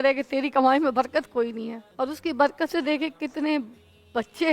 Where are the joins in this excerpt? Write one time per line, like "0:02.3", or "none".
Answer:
0:01.8